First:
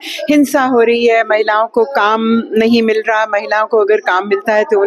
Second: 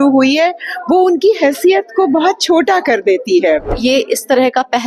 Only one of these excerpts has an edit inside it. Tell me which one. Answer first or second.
second